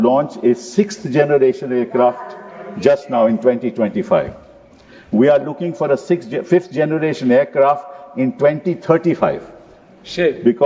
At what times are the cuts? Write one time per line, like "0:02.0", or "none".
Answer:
none